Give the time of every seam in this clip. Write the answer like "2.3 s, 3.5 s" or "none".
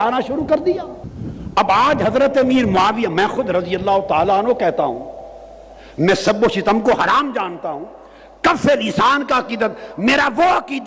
none